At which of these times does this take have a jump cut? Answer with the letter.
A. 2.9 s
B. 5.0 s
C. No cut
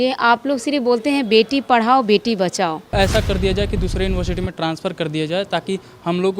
A